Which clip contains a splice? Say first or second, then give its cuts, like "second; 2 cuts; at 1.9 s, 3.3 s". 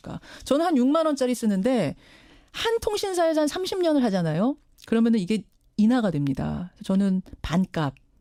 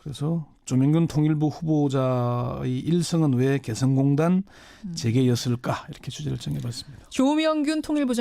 second; 1 cut; at 1.4 s